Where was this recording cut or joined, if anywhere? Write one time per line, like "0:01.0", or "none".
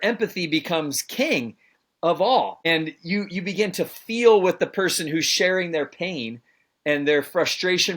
0:02.6